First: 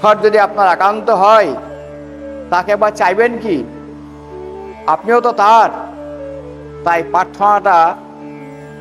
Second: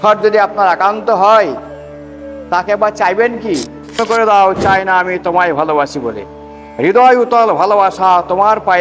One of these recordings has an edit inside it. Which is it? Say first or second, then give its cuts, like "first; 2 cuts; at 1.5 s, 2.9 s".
second; 1 cut; at 4.0 s